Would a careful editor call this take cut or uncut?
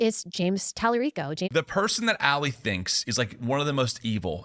cut